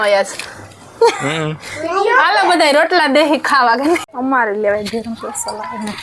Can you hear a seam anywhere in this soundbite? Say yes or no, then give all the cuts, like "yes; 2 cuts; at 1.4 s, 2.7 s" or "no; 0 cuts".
yes; 1 cut; at 4.1 s